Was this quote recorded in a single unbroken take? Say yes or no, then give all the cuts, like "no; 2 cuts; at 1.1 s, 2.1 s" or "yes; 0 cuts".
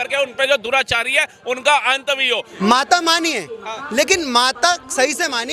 no; 1 cut; at 2.5 s